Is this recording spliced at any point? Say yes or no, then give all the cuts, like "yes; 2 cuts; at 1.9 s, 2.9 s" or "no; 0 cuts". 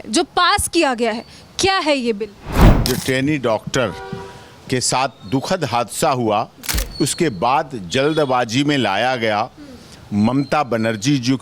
yes; 1 cut; at 2.5 s